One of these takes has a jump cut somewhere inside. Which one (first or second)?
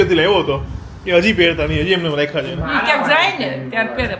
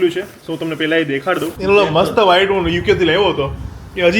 second